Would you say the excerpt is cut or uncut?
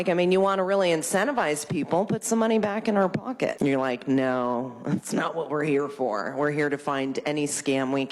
cut